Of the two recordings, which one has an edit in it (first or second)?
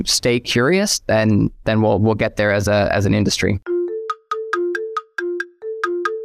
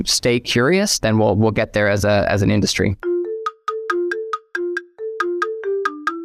second